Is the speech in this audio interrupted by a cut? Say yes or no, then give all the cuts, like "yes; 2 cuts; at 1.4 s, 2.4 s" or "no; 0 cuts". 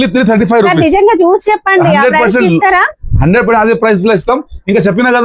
no; 0 cuts